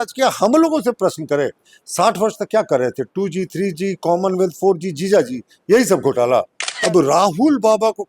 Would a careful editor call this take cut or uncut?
cut